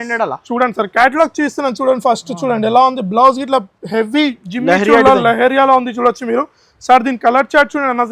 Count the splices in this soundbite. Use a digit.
0